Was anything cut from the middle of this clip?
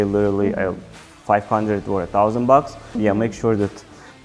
yes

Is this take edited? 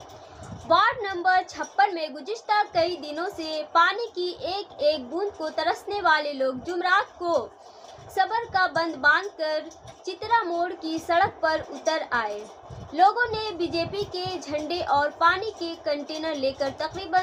no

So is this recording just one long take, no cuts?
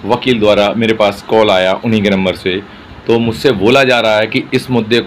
yes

